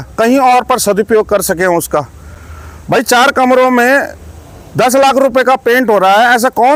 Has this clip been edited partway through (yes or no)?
no